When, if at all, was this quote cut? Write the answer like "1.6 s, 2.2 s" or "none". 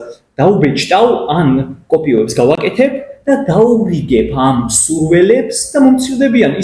none